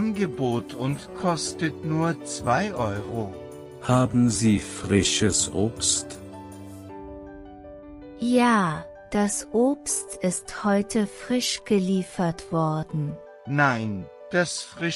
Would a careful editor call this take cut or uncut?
uncut